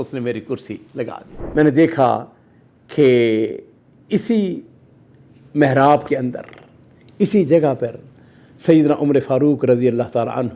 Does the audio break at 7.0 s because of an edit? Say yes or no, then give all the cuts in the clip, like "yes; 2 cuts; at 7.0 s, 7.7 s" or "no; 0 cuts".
no; 1 cut; at 1.3 s